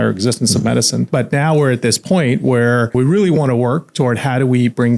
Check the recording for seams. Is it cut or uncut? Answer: cut